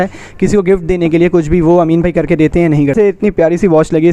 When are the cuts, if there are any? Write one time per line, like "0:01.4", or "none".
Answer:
0:02.9